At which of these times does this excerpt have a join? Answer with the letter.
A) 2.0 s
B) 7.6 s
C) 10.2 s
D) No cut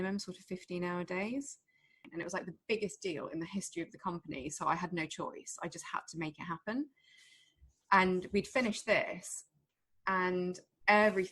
A